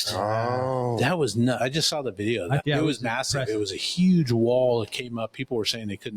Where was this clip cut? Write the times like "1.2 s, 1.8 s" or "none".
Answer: 2.6 s